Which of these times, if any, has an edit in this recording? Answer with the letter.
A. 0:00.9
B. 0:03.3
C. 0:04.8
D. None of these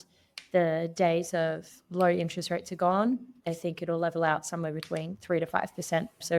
D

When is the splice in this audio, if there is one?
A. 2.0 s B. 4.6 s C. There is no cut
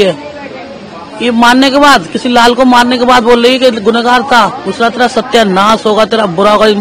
B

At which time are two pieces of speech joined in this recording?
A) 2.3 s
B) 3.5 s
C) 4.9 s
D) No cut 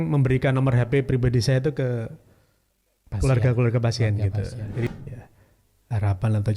C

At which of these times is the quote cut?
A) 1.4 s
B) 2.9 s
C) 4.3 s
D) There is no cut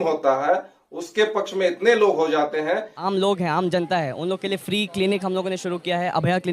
B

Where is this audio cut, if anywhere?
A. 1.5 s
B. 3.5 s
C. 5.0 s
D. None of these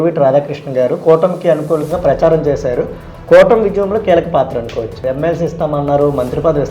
C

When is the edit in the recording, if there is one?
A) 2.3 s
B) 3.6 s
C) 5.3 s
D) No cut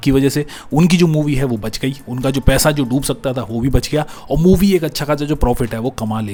D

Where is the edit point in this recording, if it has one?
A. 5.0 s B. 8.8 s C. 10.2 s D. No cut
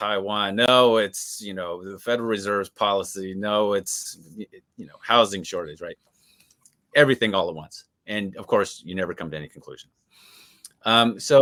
D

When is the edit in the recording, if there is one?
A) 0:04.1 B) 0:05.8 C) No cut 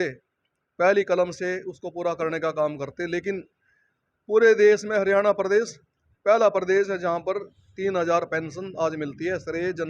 C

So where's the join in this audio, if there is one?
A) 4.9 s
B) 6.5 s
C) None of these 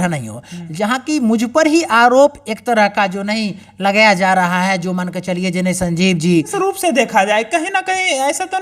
B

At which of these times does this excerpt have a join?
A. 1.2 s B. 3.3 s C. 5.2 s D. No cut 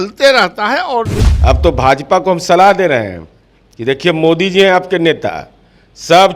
A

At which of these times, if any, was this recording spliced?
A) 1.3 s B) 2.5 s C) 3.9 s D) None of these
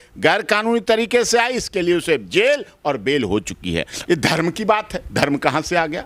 C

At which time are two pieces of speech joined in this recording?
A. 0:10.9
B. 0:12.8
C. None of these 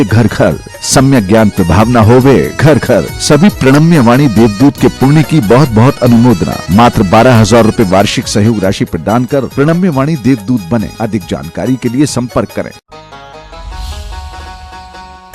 B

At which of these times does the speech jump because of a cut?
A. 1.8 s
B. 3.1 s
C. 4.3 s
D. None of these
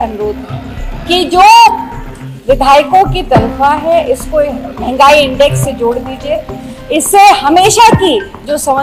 D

